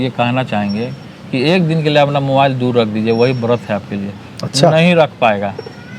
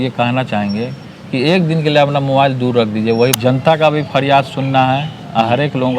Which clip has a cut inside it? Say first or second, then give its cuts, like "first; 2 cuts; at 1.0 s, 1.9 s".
second; 1 cut; at 3.4 s